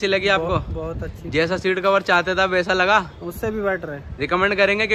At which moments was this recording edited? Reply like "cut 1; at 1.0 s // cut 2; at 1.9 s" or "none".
none